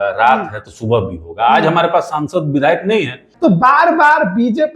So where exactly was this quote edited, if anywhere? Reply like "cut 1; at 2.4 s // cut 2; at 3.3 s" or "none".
cut 1; at 3.3 s